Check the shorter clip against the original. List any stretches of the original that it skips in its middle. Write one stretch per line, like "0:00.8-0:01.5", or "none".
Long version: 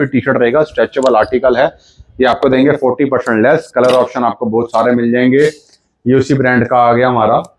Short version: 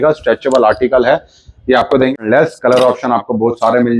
0:02.6-0:03.2

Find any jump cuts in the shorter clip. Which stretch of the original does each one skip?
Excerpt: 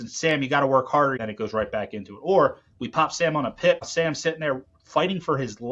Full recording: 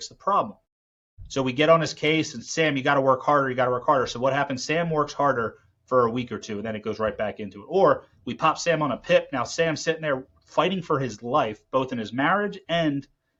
0:03.5-0:06.6
0:09.3-0:09.5

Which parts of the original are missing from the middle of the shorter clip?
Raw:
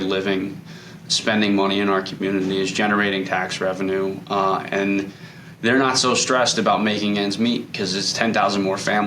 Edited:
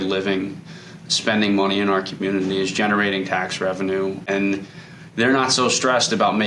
0:04.2-0:04.7

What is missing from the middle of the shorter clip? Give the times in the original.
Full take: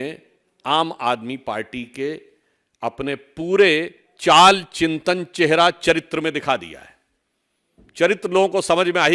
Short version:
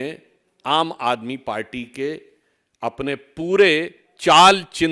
none

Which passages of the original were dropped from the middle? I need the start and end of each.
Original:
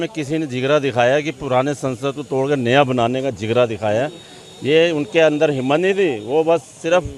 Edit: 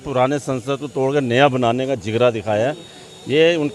none

